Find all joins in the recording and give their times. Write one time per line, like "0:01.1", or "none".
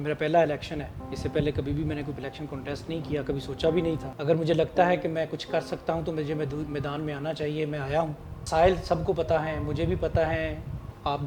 0:04.1